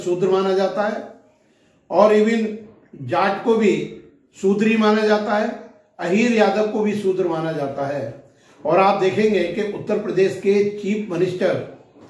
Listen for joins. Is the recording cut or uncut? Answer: uncut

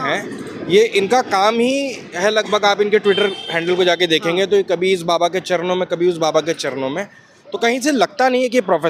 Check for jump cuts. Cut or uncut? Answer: uncut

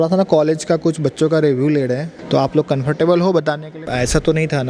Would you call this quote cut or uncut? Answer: cut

